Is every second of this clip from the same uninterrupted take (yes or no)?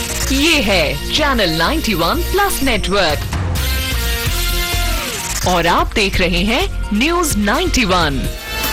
yes